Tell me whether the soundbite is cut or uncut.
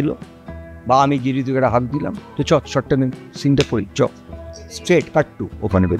uncut